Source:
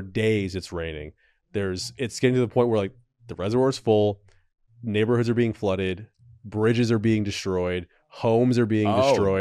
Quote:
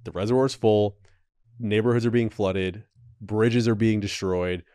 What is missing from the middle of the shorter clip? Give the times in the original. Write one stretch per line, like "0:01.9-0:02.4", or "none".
none